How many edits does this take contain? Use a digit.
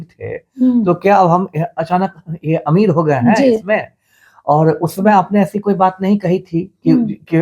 0